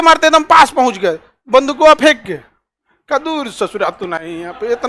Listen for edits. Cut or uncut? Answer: uncut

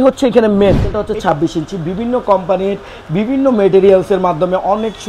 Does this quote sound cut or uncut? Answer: cut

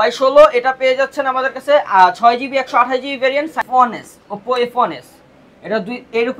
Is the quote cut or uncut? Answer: cut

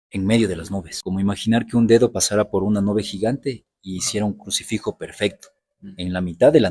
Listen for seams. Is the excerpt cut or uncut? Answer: cut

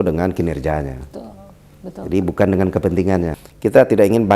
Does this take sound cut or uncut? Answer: cut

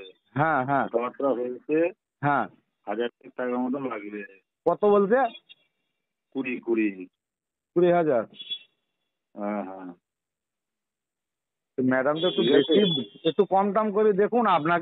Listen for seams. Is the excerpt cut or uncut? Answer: uncut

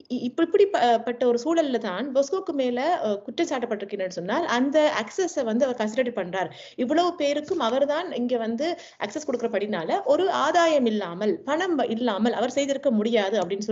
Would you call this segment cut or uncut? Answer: uncut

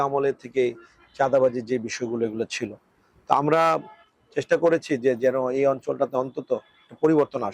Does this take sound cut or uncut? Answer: uncut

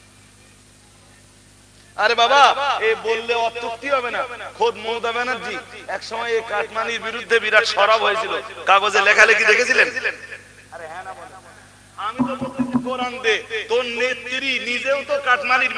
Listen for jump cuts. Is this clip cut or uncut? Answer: uncut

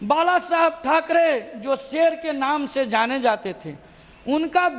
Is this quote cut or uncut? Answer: uncut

